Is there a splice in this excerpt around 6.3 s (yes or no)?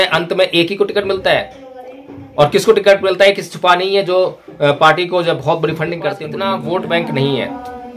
yes